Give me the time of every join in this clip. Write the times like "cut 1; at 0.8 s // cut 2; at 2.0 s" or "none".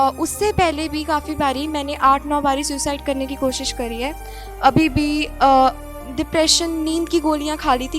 none